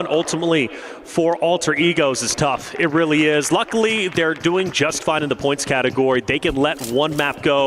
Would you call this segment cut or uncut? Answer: cut